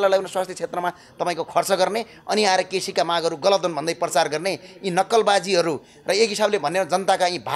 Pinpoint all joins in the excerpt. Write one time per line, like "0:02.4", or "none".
none